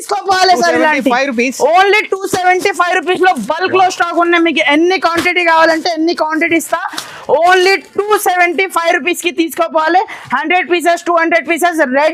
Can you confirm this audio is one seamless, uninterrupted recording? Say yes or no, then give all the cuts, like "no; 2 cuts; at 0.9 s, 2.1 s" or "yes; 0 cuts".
yes; 0 cuts